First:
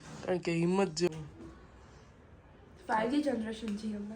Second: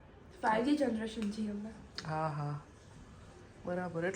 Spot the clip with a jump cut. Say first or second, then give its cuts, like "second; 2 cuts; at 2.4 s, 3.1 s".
first; 1 cut; at 1.1 s